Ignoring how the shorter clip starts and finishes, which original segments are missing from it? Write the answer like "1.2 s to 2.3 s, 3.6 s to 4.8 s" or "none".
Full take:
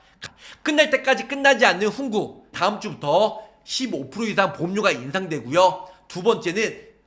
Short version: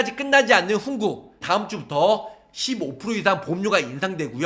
none